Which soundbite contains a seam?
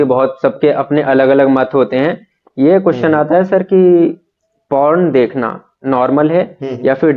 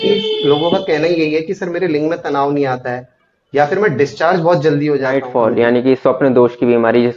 second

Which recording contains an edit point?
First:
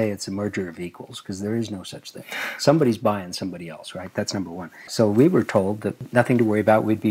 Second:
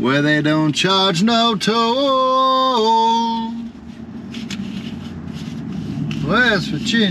first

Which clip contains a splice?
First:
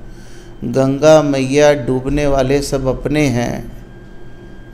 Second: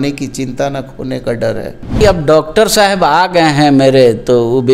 second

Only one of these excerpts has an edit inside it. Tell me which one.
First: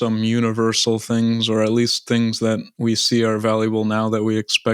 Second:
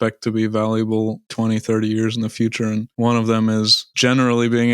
second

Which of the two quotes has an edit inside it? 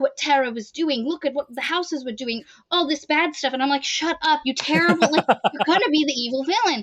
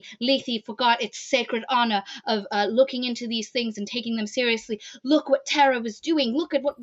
first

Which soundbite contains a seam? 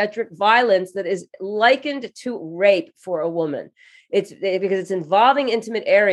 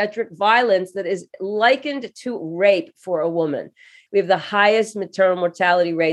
second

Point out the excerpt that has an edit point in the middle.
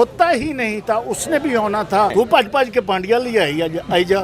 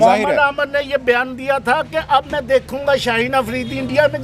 first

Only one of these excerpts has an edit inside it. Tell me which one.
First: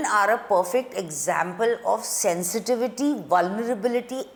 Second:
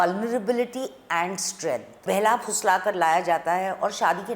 second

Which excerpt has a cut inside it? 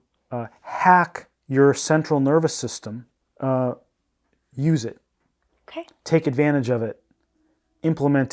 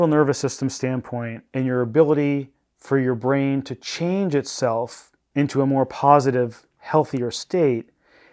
second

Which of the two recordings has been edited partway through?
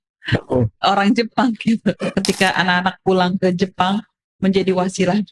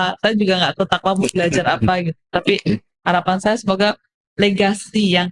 first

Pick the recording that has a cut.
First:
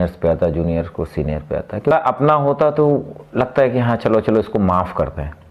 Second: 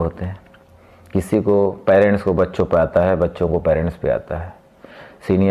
first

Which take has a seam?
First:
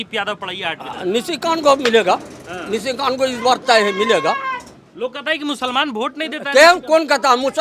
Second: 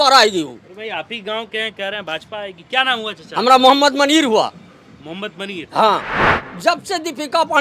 second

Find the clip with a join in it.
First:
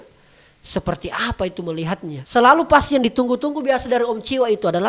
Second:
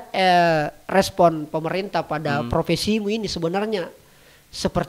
first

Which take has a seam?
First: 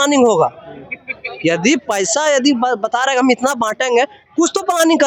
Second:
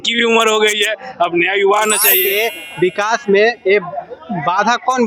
second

